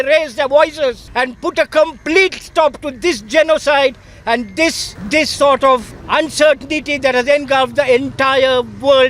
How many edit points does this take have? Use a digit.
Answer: 3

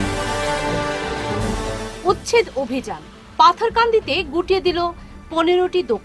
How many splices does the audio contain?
1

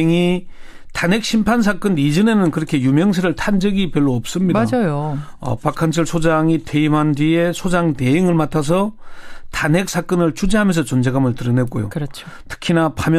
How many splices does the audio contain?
0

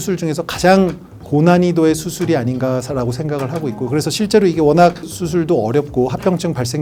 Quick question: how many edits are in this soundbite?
0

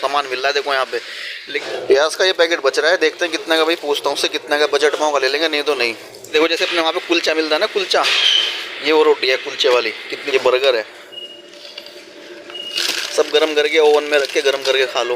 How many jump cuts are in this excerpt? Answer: 3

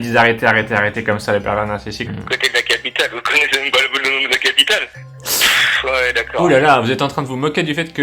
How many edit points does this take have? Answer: 2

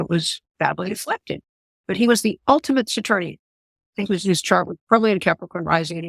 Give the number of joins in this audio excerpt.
0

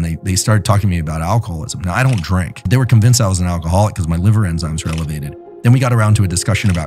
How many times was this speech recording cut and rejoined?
1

